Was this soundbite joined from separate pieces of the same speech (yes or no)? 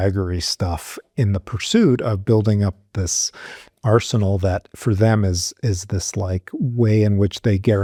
no